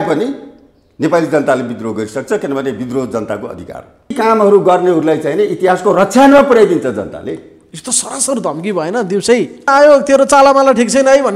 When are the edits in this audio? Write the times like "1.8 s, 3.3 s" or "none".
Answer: 4.1 s, 9.7 s